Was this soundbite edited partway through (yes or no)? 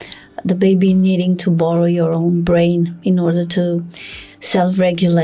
no